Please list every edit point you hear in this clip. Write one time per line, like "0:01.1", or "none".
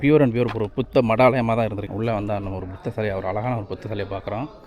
0:01.8